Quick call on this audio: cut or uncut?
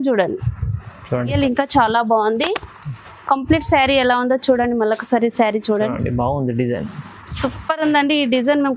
cut